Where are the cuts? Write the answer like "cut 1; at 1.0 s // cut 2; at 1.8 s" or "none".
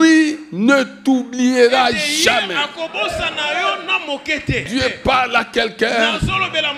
cut 1; at 4.7 s